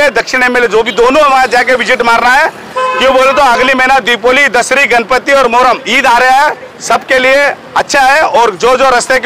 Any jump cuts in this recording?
yes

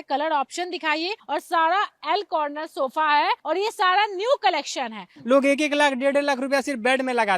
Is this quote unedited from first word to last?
no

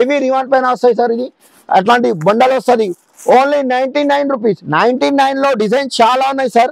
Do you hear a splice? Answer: no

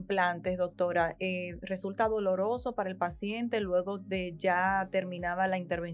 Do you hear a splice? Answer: no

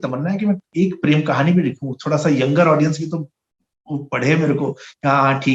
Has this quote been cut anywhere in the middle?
no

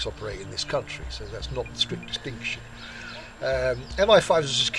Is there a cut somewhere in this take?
no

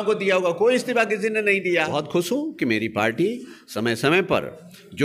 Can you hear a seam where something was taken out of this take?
yes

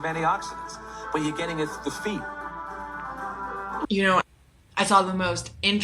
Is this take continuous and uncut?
no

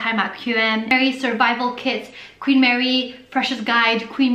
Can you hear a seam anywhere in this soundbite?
yes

